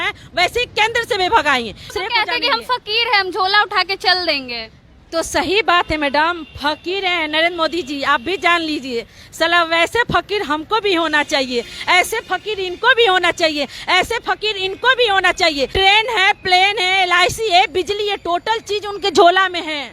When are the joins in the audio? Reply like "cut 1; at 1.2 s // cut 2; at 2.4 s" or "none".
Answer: cut 1; at 1.9 s // cut 2; at 15.7 s